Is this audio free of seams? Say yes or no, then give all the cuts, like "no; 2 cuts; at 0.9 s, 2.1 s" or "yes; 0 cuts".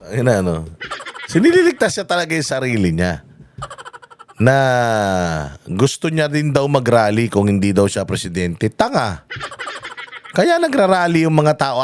yes; 0 cuts